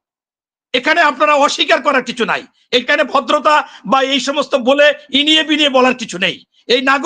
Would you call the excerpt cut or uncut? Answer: uncut